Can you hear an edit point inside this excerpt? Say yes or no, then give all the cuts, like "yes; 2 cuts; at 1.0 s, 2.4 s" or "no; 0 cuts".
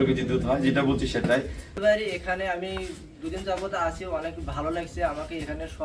yes; 1 cut; at 1.6 s